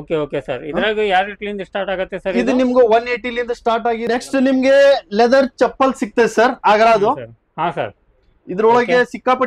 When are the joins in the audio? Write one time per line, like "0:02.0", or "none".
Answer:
0:04.0

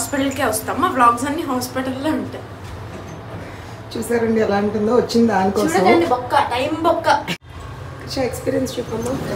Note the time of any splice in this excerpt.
0:07.4

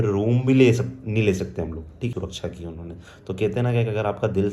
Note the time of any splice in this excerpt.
0:02.1

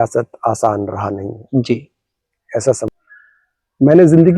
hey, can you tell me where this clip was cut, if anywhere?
0:02.9

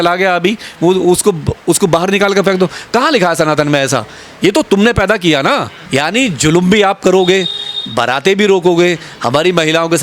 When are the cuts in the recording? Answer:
0:05.8

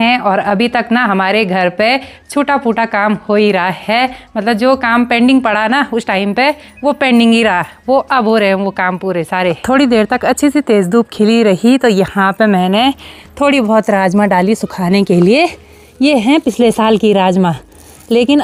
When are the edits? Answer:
none

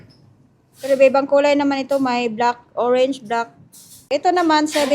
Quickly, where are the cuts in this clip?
0:04.0

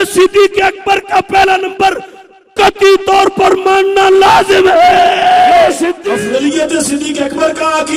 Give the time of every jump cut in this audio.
0:06.1

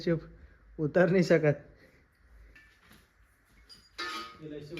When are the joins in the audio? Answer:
0:02.6

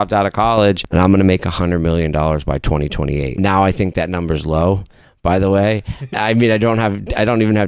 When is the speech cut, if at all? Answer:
0:00.8
0:03.3
0:06.1

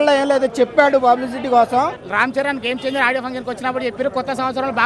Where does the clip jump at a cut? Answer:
0:02.0

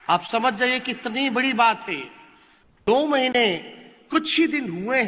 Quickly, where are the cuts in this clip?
0:02.8

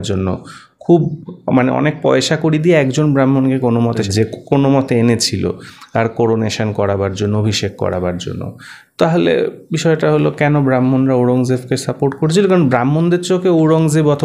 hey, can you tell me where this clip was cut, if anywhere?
0:04.0

